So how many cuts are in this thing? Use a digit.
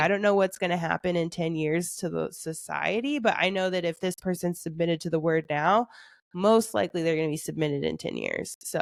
0